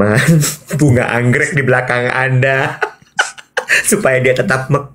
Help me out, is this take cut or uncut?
uncut